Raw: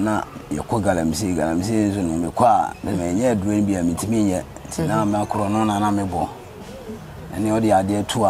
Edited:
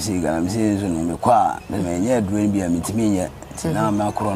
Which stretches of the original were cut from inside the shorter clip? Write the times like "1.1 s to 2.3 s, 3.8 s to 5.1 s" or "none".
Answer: none